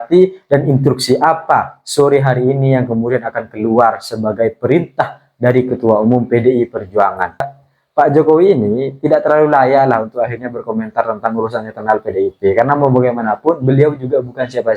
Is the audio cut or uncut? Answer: cut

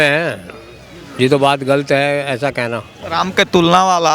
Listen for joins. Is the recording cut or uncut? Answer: cut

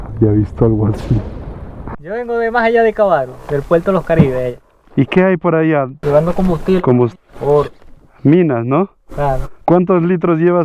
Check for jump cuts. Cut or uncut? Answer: cut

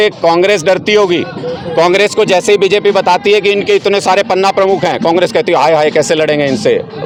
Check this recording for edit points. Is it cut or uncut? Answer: uncut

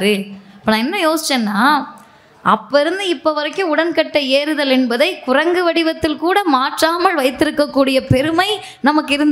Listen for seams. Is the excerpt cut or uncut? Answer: uncut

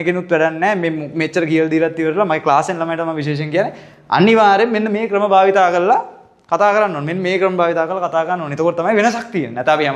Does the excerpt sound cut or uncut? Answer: uncut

